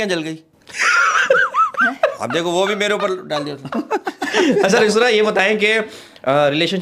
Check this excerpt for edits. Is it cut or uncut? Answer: uncut